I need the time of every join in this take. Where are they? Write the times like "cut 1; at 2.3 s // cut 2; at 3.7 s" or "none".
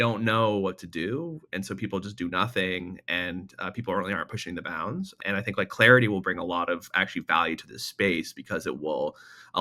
cut 1; at 5.2 s